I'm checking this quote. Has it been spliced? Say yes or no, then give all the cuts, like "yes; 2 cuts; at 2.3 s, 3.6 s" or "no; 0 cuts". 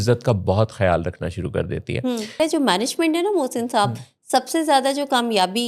yes; 1 cut; at 2.4 s